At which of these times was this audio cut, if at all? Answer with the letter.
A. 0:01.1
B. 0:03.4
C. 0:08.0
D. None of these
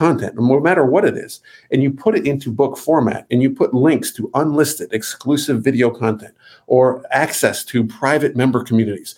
D